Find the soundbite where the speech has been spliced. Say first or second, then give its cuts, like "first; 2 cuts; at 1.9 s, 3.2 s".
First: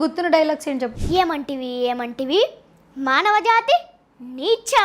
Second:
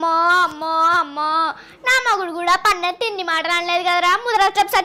first; 1 cut; at 1.0 s